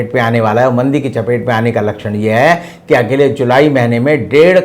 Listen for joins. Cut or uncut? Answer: uncut